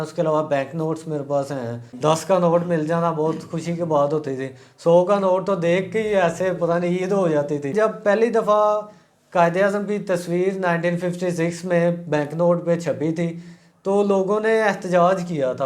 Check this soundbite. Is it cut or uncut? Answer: cut